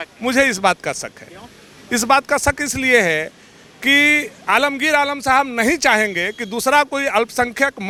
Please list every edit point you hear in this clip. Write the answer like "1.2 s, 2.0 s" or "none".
none